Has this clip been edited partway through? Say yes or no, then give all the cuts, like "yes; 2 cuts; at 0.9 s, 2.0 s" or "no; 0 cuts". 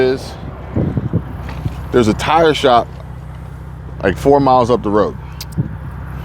no; 0 cuts